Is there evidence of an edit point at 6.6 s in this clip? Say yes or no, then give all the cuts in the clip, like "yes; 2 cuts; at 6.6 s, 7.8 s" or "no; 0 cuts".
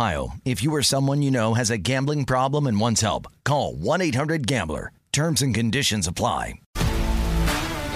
yes; 1 cut; at 6.6 s